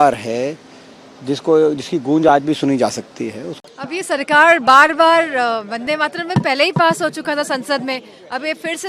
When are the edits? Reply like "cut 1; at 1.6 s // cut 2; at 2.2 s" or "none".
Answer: cut 1; at 3.5 s